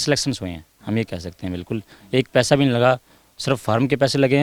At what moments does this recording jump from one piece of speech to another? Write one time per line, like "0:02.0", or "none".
none